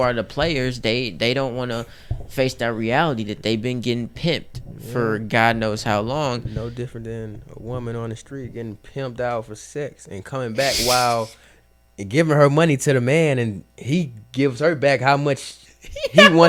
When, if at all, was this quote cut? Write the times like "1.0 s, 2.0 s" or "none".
none

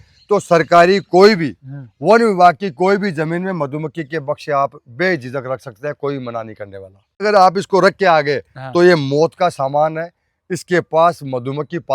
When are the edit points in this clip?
7.2 s

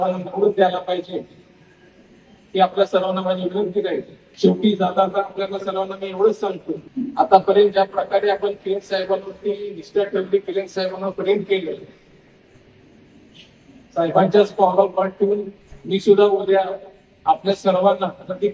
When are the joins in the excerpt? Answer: 4.2 s, 6.9 s

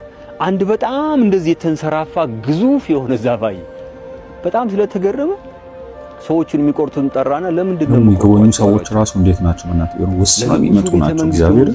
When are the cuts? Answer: none

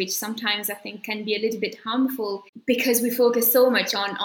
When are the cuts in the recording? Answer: none

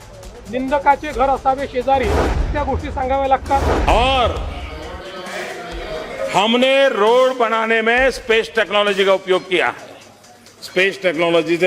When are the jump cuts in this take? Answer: 2.5 s

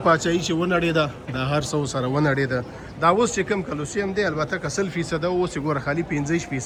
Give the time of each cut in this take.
none

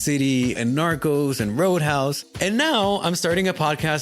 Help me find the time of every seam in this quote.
2.2 s

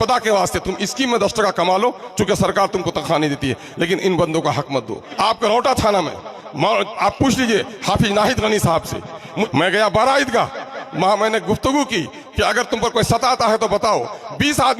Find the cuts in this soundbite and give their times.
5.0 s, 9.5 s

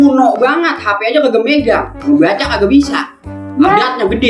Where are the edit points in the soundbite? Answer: none

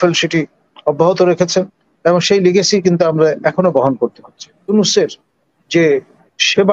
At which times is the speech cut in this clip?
4.7 s

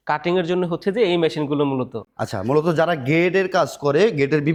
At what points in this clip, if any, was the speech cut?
none

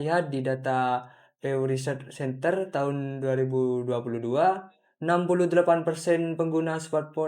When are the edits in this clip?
none

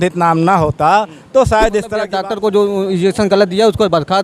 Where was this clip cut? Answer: 2.0 s

